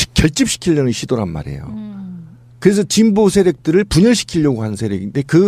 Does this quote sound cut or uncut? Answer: uncut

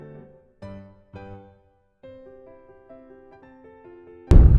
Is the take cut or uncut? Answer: cut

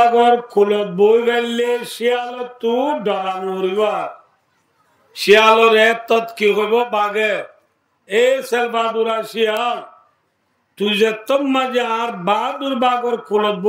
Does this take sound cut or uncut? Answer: uncut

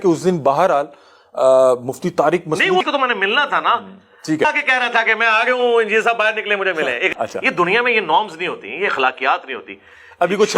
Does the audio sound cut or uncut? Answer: cut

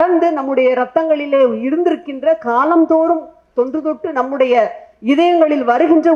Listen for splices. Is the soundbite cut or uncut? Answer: uncut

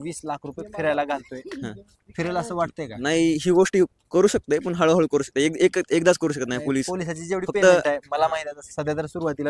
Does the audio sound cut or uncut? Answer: uncut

